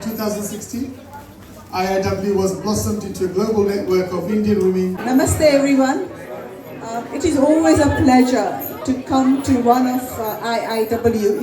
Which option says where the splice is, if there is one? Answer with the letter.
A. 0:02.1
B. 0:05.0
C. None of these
B